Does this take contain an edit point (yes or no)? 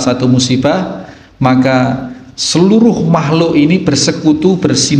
no